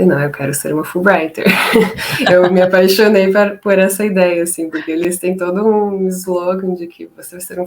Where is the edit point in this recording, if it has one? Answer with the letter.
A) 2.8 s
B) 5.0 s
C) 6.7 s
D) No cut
B